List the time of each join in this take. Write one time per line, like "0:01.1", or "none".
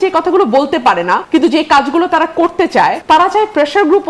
0:01.2
0:03.0